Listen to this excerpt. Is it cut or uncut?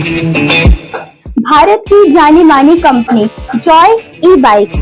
uncut